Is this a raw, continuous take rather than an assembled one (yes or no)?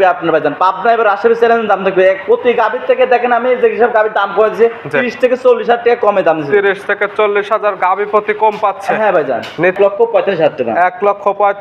no